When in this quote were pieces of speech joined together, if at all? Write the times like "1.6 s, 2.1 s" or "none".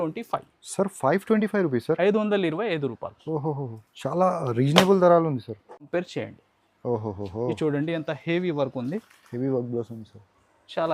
5.9 s